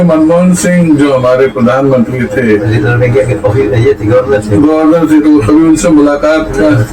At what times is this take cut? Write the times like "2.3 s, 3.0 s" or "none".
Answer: none